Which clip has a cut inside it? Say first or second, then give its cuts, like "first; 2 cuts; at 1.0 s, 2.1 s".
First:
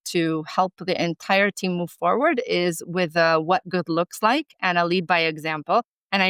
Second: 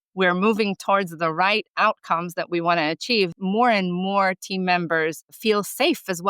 second; 2 cuts; at 3.4 s, 5.4 s